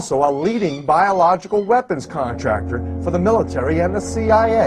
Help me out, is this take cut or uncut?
cut